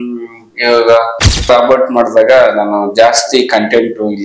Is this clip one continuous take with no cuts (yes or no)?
no